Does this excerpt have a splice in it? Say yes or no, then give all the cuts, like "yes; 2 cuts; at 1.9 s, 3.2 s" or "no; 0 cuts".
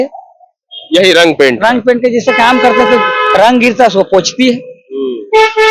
no; 0 cuts